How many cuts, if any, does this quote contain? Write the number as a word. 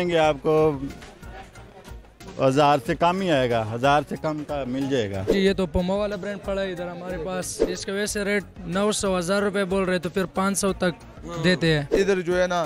three